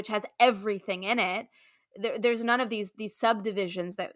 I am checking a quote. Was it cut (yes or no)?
no